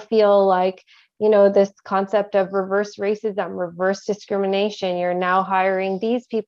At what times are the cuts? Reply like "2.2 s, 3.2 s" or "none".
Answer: none